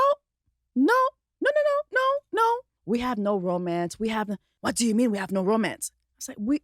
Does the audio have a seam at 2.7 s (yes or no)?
yes